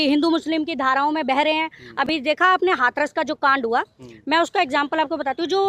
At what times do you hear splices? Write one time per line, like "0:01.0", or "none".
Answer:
none